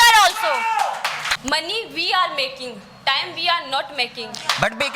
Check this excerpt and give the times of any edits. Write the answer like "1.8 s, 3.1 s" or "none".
1.3 s